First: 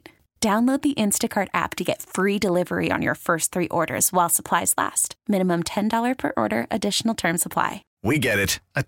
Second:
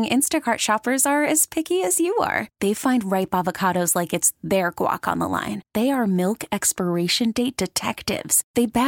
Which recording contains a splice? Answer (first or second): first